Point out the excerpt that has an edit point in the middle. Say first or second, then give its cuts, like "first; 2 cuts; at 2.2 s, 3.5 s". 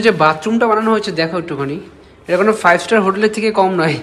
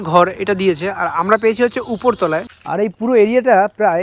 second; 1 cut; at 2.5 s